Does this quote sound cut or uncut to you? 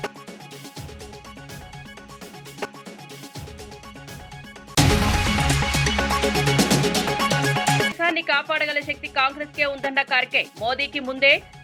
uncut